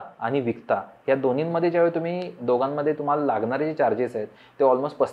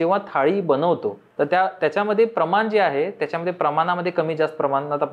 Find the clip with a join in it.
second; 1 cut; at 1.2 s

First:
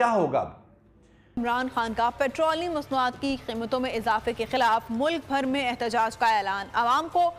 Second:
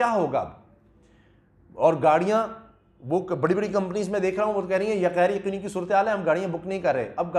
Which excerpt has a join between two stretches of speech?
first; 1 cut; at 1.3 s

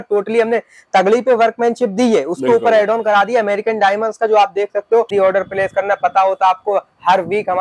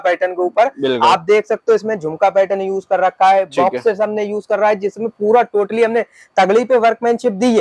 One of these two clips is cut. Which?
first; 1 cut; at 5.1 s

